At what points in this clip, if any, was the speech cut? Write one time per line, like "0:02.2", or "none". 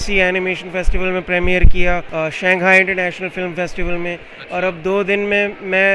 0:02.1